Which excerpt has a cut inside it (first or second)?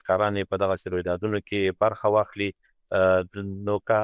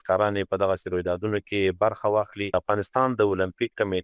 second